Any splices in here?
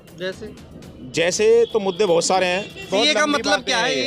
yes; 1 cut; at 2.8 s

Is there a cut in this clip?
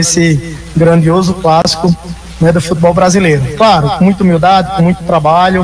no; 0 cuts

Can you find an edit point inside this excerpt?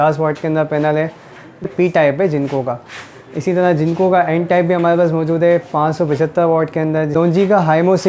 yes; 2 cuts; at 1.7 s, 7.1 s

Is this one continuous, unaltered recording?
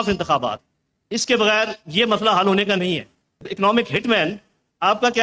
no; 1 cut; at 3.5 s

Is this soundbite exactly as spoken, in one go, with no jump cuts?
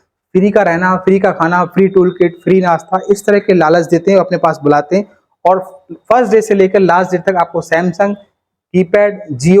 yes; 0 cuts

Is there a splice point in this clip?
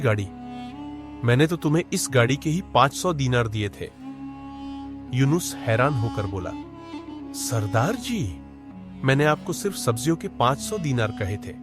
yes; 2 cuts; at 3.9 s, 5.1 s

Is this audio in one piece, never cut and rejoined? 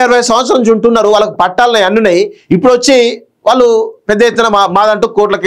yes; 0 cuts

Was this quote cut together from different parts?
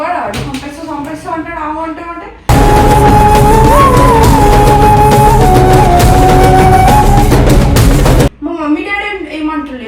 yes; 1 cut; at 8.4 s

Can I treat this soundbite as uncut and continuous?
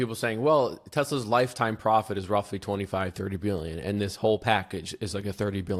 yes; 0 cuts

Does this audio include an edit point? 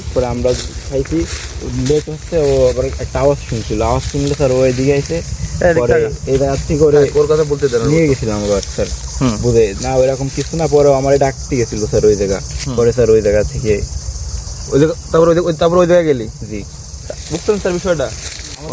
no; 0 cuts

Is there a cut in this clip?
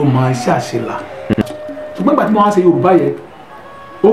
yes; 1 cut; at 1.3 s

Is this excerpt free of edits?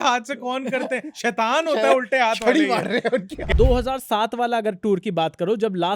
no; 1 cut; at 3.5 s

